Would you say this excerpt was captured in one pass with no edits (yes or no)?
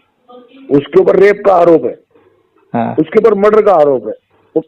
yes